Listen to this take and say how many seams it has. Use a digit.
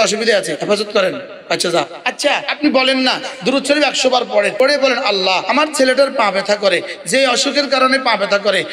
1